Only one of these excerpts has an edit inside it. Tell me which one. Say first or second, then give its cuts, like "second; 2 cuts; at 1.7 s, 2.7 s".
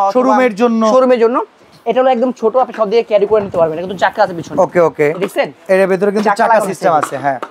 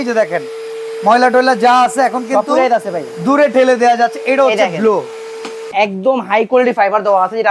second; 1 cut; at 5.6 s